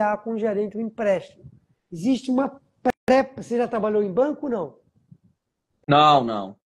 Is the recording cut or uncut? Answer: uncut